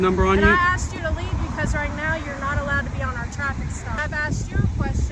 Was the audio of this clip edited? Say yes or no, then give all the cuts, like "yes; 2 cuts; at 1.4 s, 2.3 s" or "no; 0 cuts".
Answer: yes; 1 cut; at 3.9 s